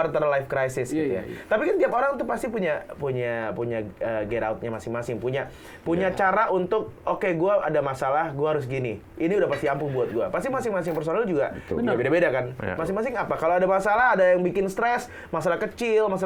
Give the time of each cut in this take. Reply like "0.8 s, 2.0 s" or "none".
none